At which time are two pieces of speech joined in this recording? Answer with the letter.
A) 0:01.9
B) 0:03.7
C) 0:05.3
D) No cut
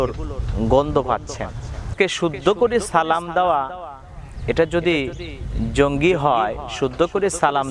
A